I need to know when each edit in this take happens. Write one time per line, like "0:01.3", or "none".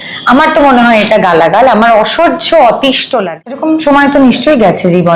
0:03.1